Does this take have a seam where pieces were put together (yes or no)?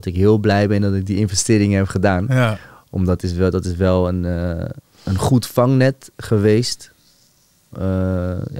no